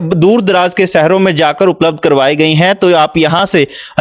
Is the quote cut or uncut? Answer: uncut